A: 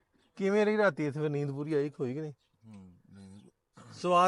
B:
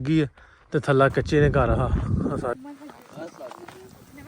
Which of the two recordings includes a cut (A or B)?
B